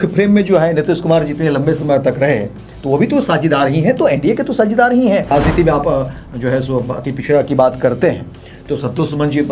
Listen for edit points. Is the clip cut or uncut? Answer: cut